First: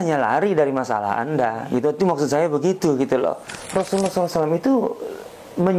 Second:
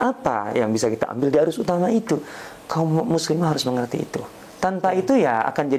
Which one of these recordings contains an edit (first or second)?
first